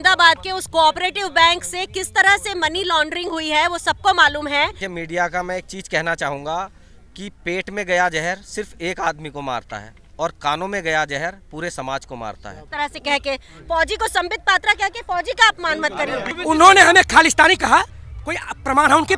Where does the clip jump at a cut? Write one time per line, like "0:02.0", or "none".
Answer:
0:04.9
0:12.6
0:16.3